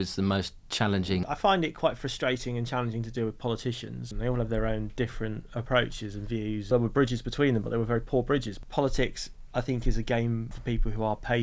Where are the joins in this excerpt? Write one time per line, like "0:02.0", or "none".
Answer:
0:01.2
0:04.1
0:06.7
0:08.6
0:10.5